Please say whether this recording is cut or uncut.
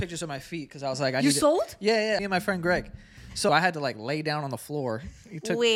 cut